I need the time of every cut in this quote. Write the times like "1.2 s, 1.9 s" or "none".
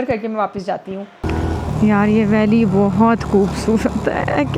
1.2 s